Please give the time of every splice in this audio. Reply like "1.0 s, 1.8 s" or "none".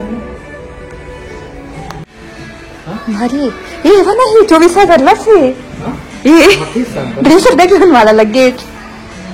2.2 s

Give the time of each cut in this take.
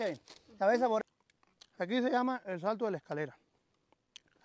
1.0 s

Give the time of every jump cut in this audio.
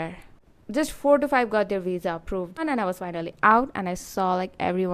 2.6 s

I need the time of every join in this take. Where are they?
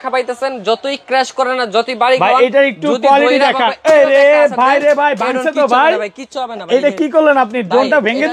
none

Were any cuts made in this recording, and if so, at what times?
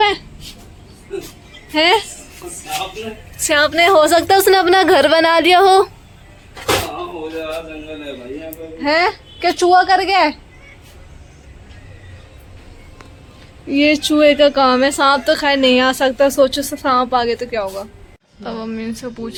none

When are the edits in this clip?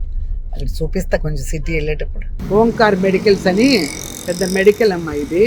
2.3 s

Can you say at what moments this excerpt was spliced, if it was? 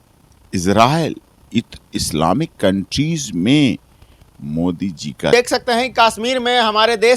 5.3 s

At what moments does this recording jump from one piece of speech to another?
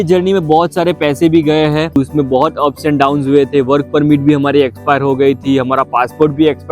2.0 s

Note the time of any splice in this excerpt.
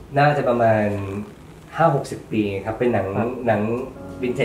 none

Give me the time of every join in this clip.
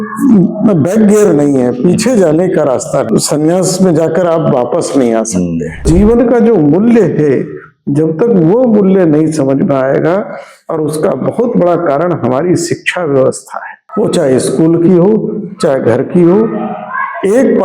3.1 s, 5.8 s

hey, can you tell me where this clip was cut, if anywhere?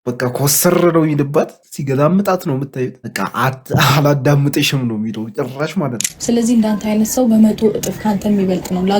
6.1 s

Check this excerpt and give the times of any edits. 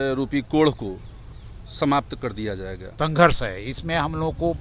2.8 s

